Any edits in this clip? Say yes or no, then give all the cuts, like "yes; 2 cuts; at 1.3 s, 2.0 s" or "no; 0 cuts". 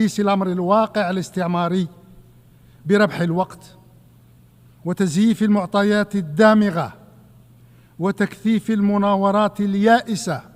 no; 0 cuts